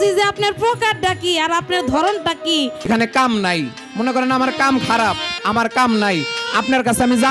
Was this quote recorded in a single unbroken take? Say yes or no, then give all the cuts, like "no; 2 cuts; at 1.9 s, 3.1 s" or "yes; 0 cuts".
no; 1 cut; at 2.9 s